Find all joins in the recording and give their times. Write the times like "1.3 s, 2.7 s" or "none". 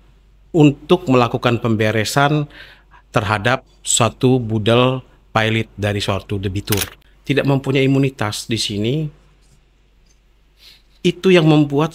7.0 s

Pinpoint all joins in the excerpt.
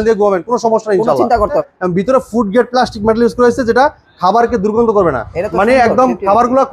1.6 s

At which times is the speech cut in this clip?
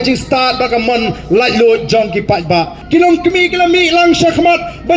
2.8 s

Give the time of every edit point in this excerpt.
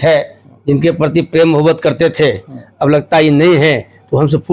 none

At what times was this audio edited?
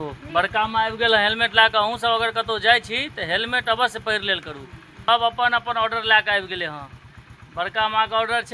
5.1 s

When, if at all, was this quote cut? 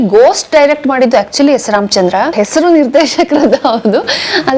2.3 s

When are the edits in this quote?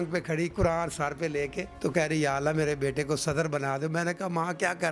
1.6 s

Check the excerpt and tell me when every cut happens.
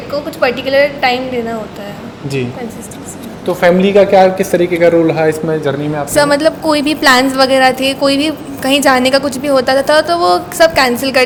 none

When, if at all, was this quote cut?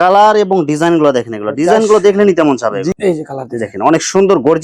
2.9 s

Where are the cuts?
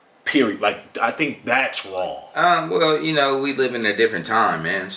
none

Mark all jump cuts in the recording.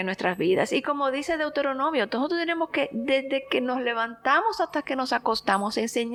none

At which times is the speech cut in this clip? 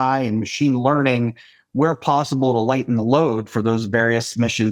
none

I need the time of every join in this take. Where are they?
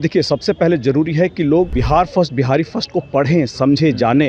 1.8 s

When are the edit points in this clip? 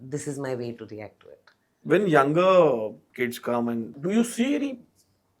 1.8 s, 3.0 s, 3.9 s

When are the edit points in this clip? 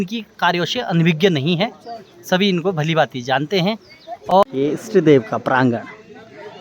4.3 s

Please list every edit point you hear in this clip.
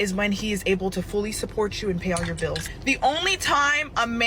2.6 s

